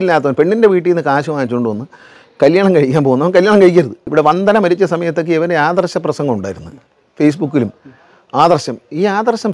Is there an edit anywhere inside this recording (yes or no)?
yes